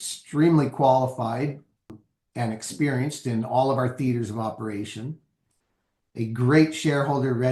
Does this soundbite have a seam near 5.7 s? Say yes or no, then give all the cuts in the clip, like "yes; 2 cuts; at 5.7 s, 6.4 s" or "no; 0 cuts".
no; 1 cut; at 2.0 s